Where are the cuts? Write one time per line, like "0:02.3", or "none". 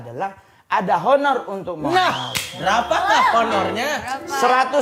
none